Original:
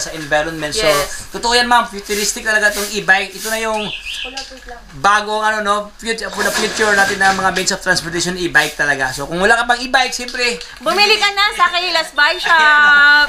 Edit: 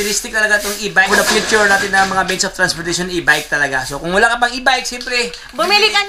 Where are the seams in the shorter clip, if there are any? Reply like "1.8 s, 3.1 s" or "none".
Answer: 1.1 s